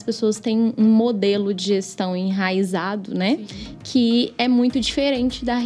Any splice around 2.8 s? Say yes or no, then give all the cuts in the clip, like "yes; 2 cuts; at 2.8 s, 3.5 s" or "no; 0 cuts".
no; 0 cuts